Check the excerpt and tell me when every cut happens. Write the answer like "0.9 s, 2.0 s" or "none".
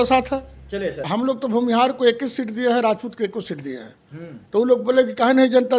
1.0 s